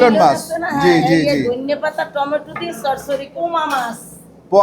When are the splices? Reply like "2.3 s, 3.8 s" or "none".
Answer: 3.3 s